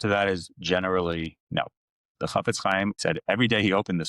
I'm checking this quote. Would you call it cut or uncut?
cut